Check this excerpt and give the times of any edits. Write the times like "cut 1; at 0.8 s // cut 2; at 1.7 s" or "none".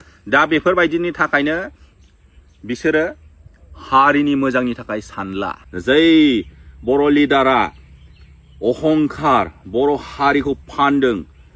cut 1; at 5.6 s

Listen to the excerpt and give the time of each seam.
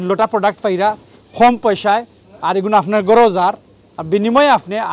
none

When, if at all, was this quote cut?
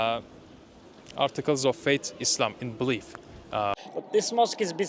cut 1; at 3.8 s

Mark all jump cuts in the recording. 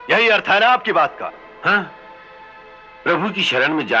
none

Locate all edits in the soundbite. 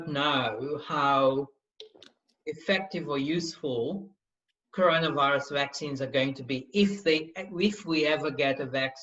none

